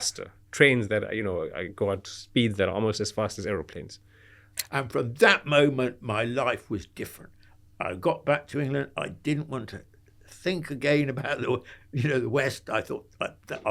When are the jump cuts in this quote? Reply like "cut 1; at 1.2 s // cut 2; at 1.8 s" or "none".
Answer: cut 1; at 2.1 s // cut 2; at 4.6 s